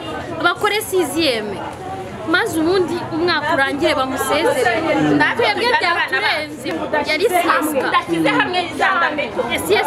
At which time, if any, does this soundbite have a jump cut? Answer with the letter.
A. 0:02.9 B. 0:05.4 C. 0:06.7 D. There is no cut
C